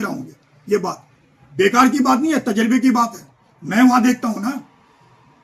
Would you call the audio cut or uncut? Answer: uncut